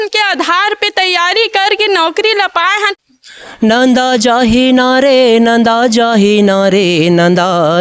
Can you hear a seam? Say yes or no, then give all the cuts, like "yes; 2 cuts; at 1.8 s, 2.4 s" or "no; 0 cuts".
yes; 1 cut; at 3.0 s